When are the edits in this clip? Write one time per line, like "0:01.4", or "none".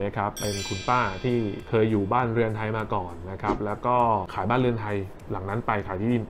none